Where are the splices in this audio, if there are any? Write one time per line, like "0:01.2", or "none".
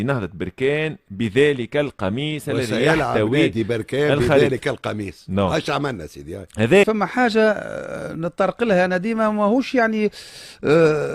0:06.8